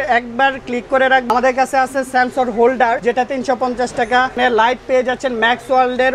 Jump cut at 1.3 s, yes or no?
yes